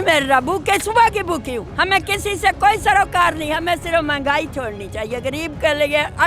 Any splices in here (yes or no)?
yes